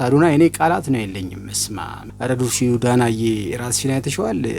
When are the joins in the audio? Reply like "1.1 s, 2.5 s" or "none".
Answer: 2.0 s